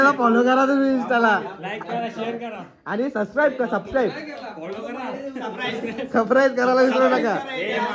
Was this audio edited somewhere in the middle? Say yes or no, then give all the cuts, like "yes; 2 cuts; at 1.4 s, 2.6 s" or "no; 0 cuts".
no; 0 cuts